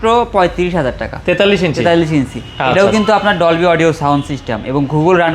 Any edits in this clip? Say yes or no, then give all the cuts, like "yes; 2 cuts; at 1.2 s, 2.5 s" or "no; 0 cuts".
no; 0 cuts